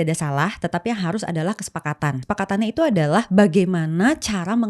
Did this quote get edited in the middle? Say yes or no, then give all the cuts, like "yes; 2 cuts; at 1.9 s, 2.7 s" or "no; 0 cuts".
yes; 1 cut; at 2.2 s